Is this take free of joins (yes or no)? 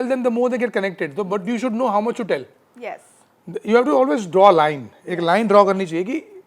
yes